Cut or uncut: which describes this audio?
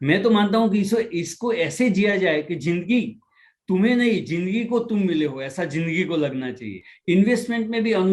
cut